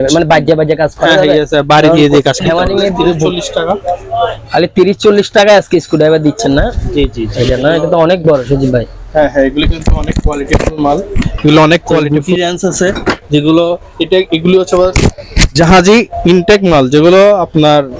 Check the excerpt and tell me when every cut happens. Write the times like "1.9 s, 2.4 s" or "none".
3.3 s, 7.2 s, 12.1 s